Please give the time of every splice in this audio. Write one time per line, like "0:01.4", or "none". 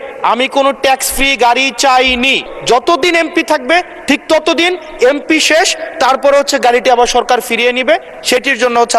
0:02.5